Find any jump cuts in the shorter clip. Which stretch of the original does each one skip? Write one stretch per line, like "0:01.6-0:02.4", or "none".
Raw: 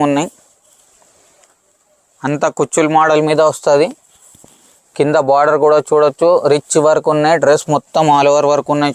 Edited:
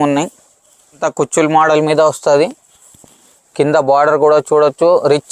0:01.0-0:02.4

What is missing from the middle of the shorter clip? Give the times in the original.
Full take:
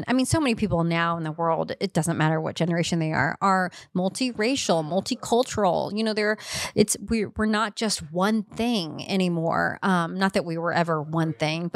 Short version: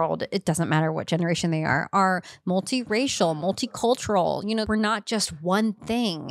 0:06.1-0:07.3

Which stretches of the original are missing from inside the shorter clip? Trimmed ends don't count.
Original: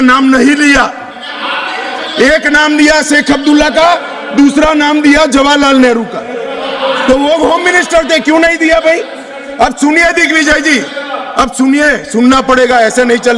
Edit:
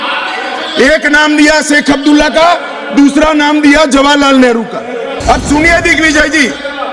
0:06.5-0:09.4

